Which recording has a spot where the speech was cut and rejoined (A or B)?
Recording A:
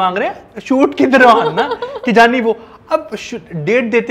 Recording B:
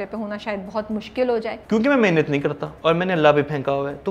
B